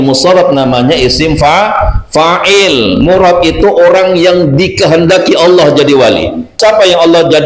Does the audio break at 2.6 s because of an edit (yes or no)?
no